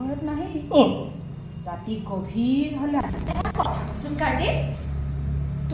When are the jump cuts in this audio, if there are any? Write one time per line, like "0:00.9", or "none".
0:03.6